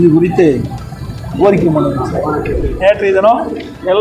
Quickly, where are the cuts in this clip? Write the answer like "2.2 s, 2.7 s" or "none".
2.5 s